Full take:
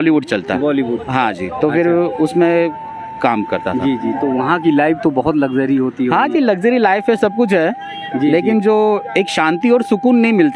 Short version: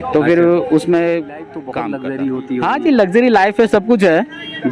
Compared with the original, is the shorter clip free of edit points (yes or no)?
no